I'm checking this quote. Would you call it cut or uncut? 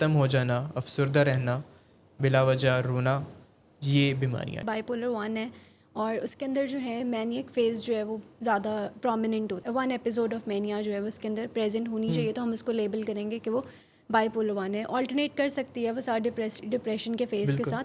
cut